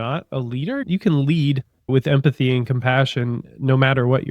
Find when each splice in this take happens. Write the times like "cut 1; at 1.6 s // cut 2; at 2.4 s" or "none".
cut 1; at 1.9 s